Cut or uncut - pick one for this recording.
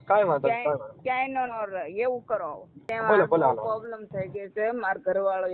cut